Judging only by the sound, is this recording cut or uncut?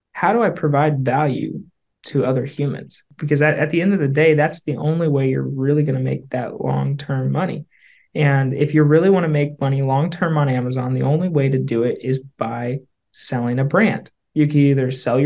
cut